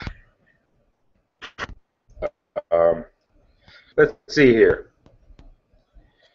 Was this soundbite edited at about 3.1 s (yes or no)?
no